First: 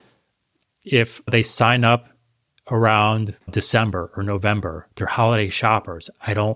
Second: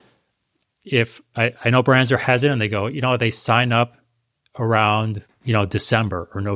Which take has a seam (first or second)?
first